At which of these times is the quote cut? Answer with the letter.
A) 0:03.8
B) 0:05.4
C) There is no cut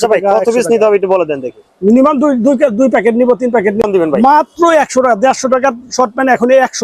A